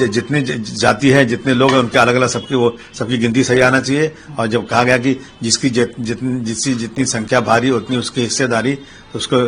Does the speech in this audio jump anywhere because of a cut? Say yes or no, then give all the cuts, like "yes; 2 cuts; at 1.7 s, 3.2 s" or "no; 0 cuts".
no; 0 cuts